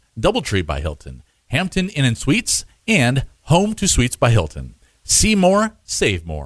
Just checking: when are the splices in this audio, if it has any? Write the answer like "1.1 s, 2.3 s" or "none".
none